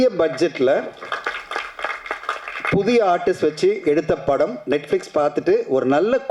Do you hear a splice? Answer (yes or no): no